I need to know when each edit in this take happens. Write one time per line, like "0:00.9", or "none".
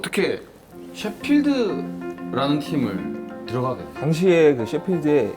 0:03.9